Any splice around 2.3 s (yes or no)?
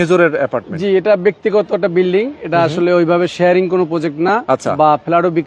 no